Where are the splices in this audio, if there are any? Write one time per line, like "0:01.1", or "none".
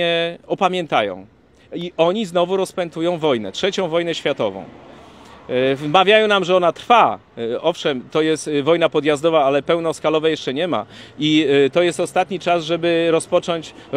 none